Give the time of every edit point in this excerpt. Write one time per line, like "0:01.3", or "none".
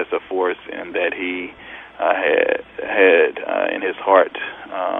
none